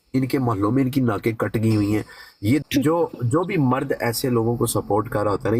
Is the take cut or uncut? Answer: cut